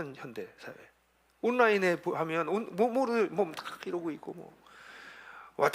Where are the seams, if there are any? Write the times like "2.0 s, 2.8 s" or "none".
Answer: none